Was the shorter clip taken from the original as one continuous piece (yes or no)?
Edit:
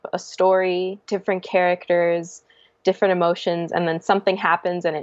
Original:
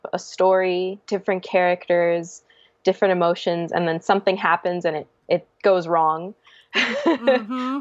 yes